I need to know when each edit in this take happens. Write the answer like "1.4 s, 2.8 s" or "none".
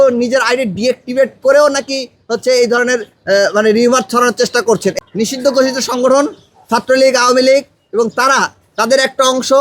4.9 s